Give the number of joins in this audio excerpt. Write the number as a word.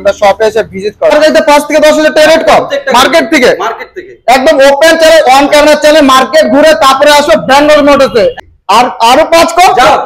two